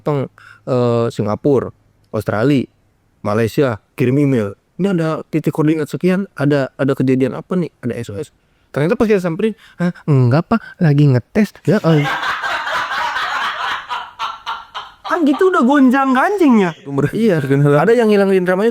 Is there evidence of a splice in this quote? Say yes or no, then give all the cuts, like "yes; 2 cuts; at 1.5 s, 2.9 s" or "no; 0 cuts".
yes; 1 cut; at 16.9 s